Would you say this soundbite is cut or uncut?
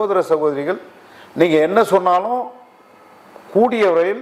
uncut